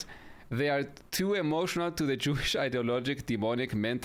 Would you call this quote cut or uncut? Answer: uncut